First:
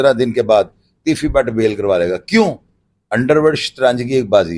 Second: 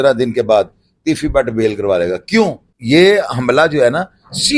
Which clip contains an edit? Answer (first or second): second